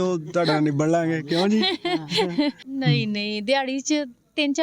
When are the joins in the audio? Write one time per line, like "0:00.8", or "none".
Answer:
0:02.6